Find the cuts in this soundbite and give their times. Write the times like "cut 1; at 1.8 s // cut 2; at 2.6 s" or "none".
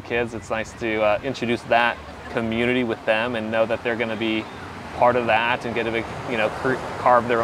none

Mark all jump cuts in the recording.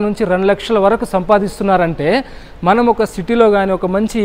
none

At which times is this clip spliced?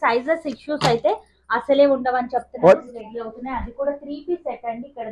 cut 1; at 2.9 s

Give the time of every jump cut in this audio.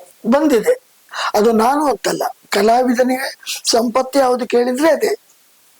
cut 1; at 1.1 s

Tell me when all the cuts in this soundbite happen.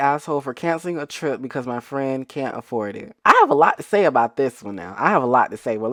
none

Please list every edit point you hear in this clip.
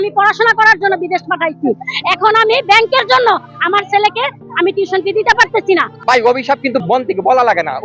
cut 1; at 5.9 s // cut 2; at 6.8 s

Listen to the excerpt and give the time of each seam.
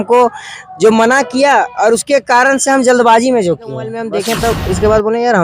cut 1; at 4.1 s

